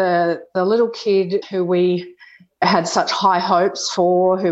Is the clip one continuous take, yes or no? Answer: no